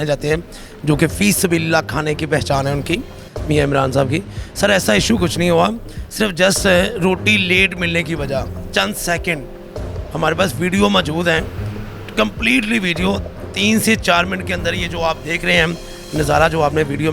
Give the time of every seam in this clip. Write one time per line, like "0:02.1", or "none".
none